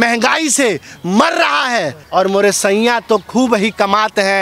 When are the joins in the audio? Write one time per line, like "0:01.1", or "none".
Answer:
0:02.0